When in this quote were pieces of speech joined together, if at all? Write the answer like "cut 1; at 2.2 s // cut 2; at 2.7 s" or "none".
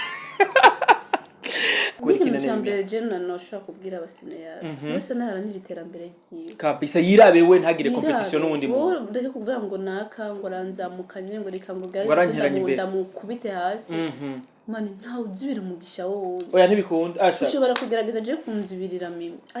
cut 1; at 1.9 s